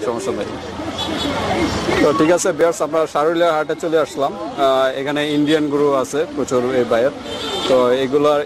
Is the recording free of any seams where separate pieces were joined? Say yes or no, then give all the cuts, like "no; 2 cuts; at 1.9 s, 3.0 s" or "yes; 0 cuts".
yes; 0 cuts